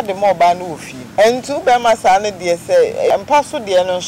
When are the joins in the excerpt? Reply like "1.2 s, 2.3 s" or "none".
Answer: 1.1 s, 3.1 s